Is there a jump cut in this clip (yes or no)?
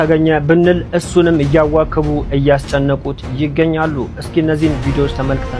no